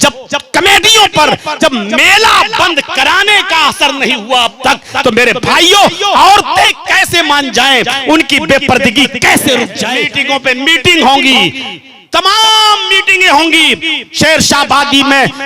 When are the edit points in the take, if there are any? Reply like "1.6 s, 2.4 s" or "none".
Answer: 1.6 s, 9.8 s